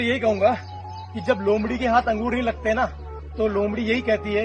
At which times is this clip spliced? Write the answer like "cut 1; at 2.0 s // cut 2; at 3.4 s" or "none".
none